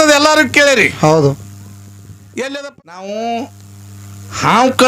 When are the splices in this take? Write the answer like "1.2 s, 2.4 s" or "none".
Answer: 2.7 s